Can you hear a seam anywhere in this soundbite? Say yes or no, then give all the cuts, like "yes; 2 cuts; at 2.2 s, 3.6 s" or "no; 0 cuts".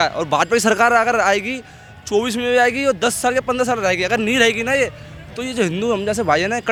no; 0 cuts